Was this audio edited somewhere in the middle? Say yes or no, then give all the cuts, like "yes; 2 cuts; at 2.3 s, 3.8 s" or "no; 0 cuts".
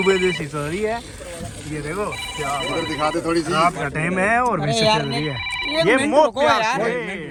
no; 0 cuts